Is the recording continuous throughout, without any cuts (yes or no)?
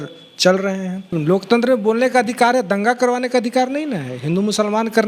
no